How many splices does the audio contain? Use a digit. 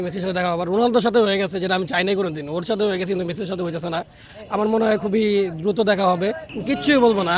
1